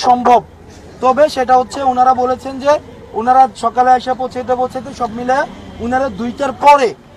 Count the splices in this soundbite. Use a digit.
0